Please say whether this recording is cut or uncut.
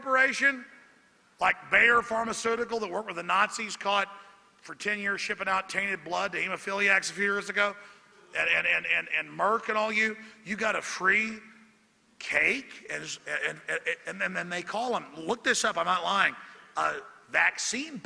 uncut